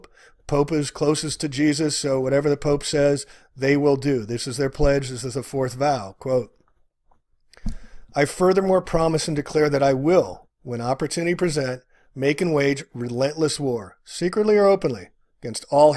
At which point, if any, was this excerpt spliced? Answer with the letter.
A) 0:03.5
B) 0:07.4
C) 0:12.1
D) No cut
B